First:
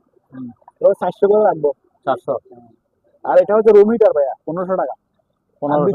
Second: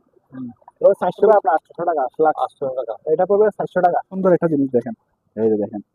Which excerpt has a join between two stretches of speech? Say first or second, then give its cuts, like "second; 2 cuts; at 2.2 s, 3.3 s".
second; 2 cuts; at 1.3 s, 4.1 s